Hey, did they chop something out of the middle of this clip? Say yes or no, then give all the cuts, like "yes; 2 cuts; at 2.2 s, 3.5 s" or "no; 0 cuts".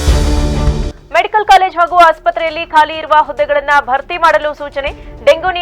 yes; 1 cut; at 1.0 s